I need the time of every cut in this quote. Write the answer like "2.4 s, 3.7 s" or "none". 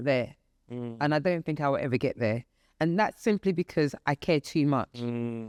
none